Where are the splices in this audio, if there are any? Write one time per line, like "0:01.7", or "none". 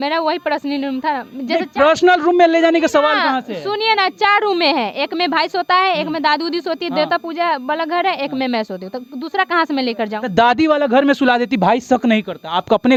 none